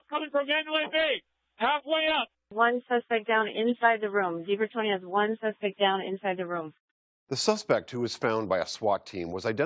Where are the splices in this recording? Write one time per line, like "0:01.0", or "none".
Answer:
0:04.3